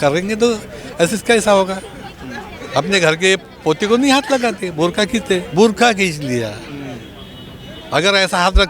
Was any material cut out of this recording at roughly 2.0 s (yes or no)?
no